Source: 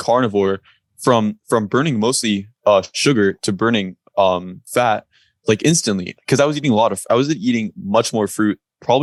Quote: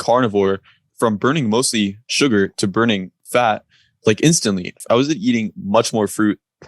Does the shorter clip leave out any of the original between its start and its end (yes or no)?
yes